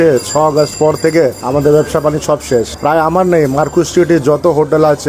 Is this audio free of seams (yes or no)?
yes